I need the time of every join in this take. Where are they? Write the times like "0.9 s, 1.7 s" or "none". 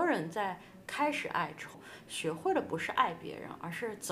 1.7 s